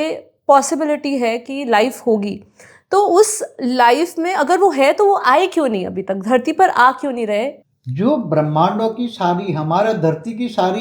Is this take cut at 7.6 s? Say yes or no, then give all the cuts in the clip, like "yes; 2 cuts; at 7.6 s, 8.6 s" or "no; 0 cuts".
yes; 1 cut; at 7.6 s